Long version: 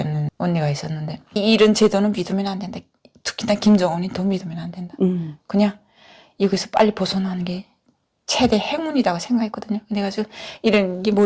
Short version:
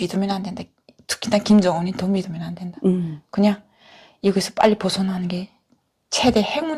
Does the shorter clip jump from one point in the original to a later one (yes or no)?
no